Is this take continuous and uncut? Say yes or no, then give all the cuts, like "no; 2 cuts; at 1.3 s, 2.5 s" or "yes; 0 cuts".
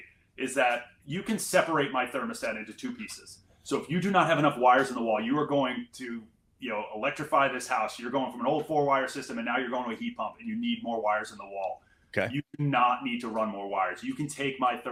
yes; 0 cuts